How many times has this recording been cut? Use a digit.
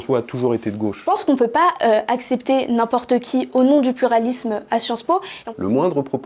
2